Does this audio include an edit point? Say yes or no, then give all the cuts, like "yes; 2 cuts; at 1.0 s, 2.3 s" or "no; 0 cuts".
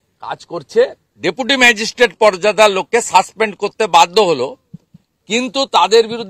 yes; 1 cut; at 1.1 s